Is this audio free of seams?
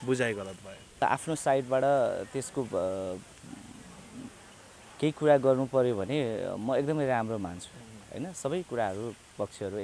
no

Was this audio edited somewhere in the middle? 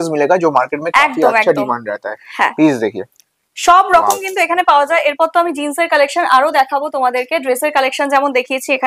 no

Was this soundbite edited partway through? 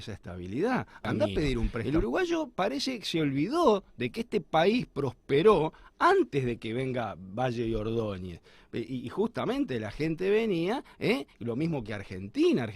yes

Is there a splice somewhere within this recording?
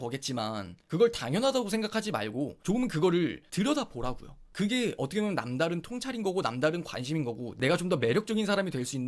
yes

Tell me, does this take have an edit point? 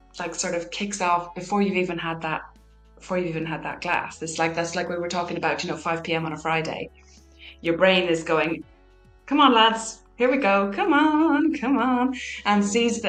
no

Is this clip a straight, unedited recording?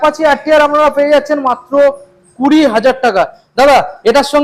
yes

